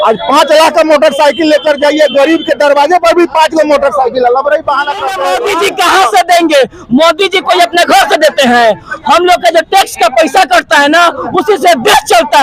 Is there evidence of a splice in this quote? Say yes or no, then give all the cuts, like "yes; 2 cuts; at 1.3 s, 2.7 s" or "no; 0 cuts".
yes; 1 cut; at 5.3 s